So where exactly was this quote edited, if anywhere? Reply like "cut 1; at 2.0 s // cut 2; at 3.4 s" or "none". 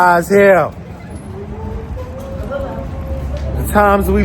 none